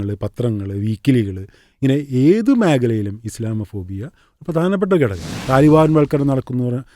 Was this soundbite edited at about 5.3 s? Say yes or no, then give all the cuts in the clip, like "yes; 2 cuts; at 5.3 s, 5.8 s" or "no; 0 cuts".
yes; 1 cut; at 5.3 s